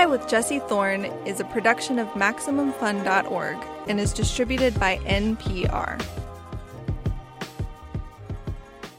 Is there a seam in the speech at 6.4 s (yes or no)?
no